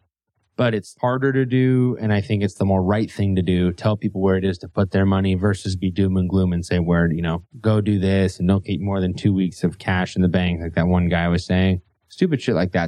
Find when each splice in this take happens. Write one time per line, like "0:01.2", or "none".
0:00.9